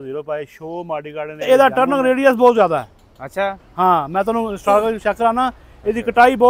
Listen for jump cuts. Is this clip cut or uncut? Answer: cut